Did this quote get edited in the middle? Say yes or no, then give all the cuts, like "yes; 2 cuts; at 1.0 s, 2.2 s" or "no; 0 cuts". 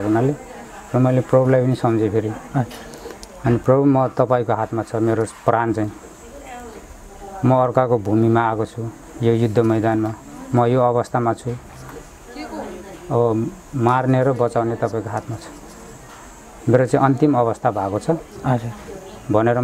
no; 0 cuts